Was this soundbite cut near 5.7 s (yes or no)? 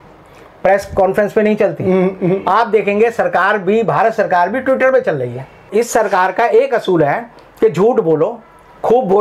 yes